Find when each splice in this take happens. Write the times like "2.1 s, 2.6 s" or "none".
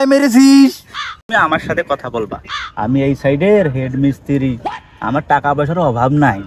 1.3 s